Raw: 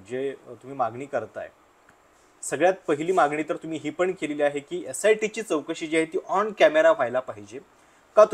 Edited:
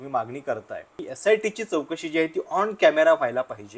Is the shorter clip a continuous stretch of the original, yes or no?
no